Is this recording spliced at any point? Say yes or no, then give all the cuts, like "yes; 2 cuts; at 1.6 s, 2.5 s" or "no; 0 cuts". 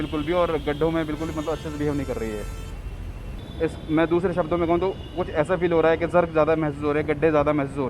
yes; 1 cut; at 3.4 s